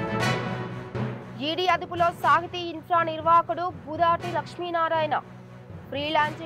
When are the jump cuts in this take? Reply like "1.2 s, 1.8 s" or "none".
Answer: 1.2 s